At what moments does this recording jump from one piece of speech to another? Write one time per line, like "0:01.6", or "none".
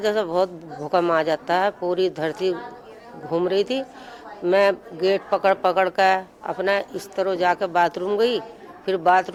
none